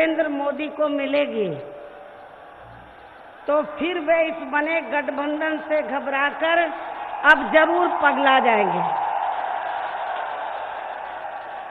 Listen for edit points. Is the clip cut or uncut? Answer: uncut